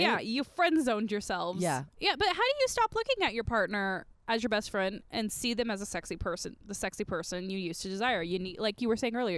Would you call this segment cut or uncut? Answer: uncut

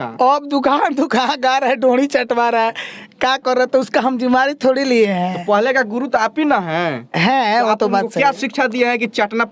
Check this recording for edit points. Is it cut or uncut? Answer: uncut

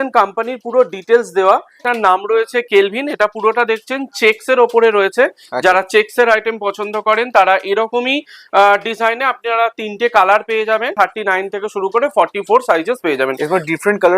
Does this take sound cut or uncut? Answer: cut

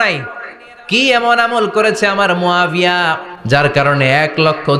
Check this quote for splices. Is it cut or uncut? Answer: cut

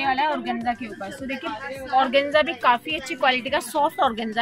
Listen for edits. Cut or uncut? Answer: uncut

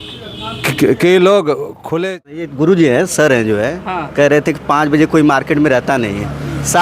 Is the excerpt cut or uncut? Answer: cut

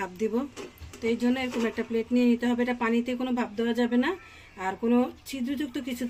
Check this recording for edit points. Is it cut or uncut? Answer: uncut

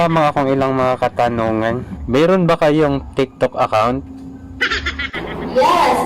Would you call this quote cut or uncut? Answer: cut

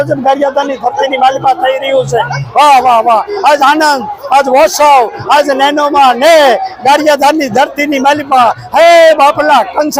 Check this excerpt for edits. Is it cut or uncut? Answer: uncut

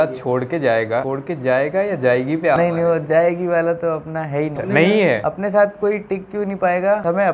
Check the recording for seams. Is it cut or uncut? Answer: uncut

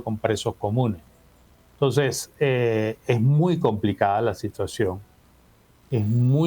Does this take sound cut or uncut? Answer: uncut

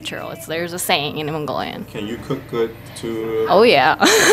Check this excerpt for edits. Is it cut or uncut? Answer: uncut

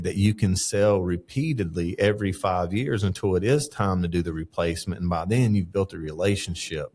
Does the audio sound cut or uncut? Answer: uncut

